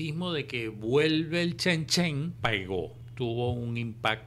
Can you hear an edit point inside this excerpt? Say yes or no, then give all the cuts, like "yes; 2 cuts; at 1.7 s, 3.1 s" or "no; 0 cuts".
yes; 1 cut; at 2.9 s